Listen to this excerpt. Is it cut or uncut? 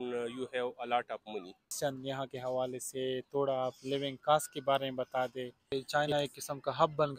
cut